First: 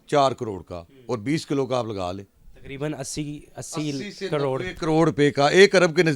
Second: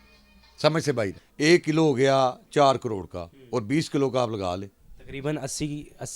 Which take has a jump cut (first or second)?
second